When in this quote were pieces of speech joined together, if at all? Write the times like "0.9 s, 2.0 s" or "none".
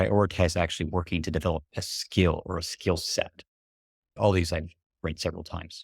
4.1 s